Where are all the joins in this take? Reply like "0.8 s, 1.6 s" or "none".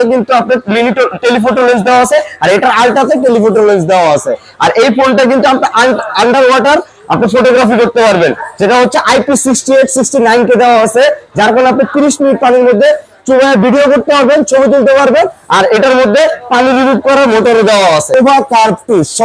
18.1 s